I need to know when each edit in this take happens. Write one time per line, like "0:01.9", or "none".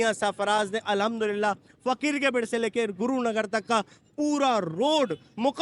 none